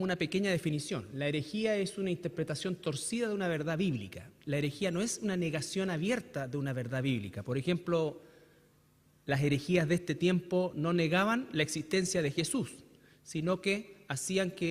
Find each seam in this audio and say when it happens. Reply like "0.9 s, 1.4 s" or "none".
3.1 s